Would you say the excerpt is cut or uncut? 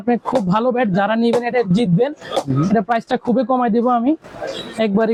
uncut